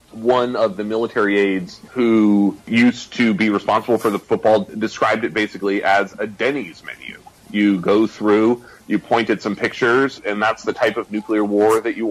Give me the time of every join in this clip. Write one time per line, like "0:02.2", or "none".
0:01.8
0:02.6
0:04.2